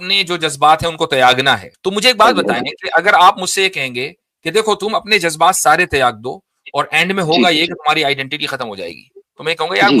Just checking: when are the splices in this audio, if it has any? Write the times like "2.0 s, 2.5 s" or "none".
1.7 s